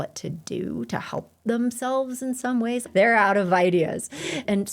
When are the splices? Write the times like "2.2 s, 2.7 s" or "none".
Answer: 2.9 s